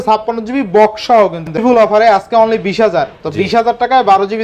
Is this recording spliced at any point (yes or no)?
yes